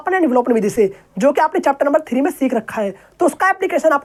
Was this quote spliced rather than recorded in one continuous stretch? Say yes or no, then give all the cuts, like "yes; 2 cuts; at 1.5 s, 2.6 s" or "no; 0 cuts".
no; 0 cuts